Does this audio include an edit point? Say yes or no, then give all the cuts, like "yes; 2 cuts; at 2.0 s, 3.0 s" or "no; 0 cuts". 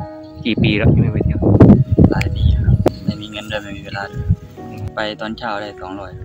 yes; 2 cuts; at 2.9 s, 4.8 s